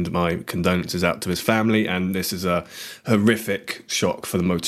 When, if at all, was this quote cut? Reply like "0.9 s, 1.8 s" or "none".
none